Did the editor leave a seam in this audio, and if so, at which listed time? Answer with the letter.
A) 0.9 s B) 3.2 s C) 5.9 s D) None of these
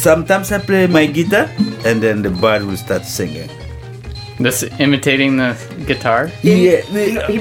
A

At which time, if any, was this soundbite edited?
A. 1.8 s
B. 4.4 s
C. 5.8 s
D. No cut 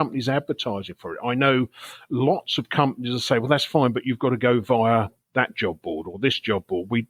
D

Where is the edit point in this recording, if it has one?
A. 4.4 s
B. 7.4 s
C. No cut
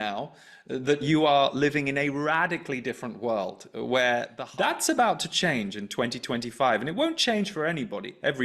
A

